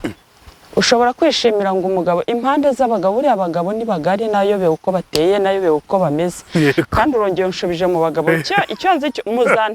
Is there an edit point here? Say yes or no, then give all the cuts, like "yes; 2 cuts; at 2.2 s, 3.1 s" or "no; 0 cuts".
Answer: no; 0 cuts